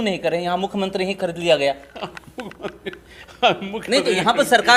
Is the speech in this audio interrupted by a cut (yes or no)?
no